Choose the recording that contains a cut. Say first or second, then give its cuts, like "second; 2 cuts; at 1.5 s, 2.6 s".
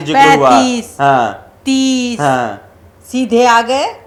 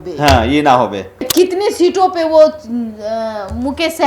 second; 1 cut; at 1.3 s